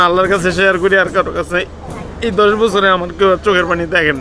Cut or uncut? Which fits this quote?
uncut